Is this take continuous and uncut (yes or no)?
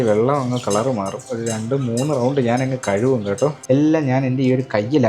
no